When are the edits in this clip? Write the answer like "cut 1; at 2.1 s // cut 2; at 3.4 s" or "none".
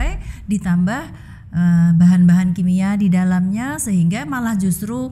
none